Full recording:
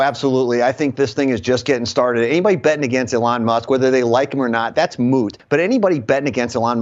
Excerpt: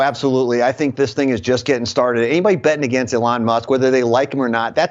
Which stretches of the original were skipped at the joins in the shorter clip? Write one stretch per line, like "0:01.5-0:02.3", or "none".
none